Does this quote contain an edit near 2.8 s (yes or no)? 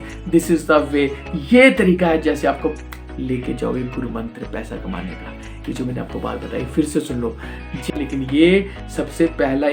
yes